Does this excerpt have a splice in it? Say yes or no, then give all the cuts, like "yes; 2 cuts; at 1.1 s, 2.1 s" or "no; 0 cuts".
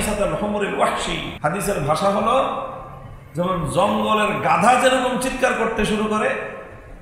yes; 1 cut; at 1.3 s